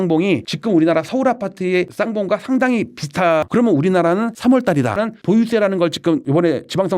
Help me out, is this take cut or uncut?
cut